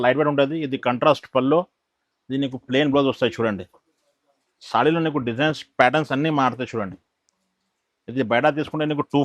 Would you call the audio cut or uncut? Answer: uncut